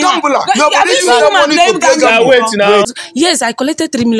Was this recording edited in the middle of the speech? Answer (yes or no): yes